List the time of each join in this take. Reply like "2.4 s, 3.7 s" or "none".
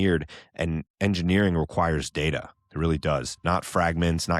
3.3 s